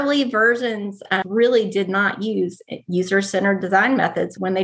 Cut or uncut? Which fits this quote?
cut